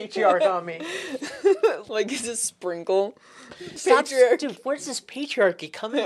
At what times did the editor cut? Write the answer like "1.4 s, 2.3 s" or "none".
1.8 s, 3.8 s